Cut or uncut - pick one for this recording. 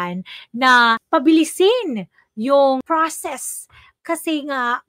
cut